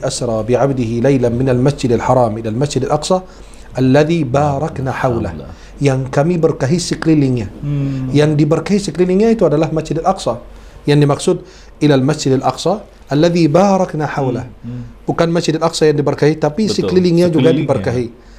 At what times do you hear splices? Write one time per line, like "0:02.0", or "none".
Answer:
none